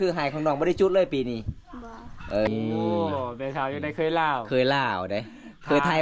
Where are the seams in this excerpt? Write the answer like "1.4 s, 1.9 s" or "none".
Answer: 2.5 s